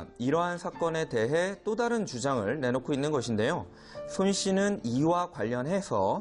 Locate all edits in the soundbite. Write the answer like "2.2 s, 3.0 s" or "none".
0.9 s